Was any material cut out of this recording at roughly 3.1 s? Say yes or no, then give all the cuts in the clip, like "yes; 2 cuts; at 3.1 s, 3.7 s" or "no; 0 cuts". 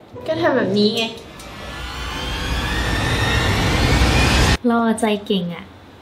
no; 1 cut; at 4.6 s